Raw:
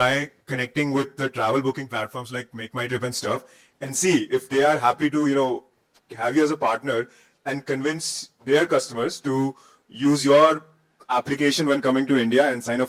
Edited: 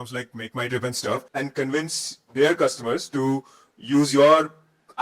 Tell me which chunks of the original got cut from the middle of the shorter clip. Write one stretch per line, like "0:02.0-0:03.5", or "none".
0:03.5-0:07.4

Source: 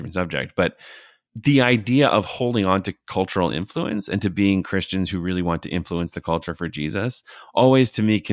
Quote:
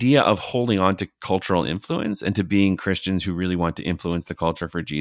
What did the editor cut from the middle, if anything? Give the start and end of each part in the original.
none

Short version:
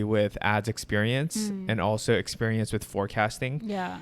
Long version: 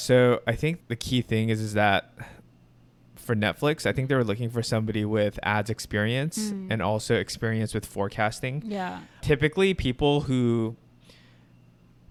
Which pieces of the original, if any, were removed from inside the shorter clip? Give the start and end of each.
none

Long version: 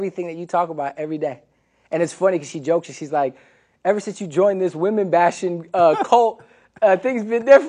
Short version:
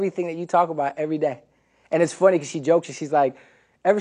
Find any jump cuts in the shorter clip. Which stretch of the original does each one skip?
none

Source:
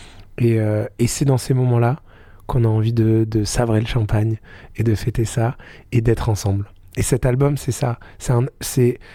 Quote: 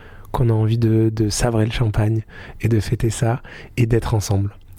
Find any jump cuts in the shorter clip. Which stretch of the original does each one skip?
none

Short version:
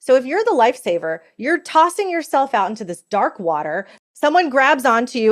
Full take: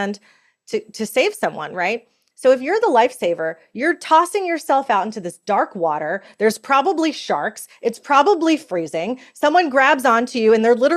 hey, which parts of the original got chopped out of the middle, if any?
0:06.3-0:09.1

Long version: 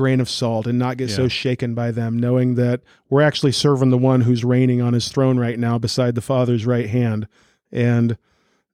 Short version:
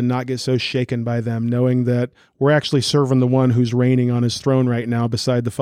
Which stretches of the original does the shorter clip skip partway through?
none

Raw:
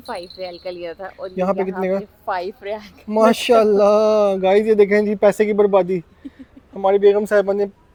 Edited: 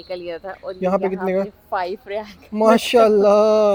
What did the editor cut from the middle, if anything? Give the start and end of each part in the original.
none

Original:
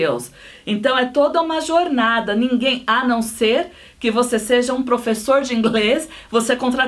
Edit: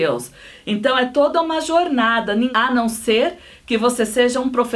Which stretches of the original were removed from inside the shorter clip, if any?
0:02.5-0:02.8

